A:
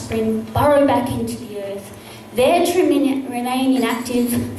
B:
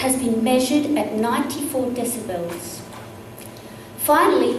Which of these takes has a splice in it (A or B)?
B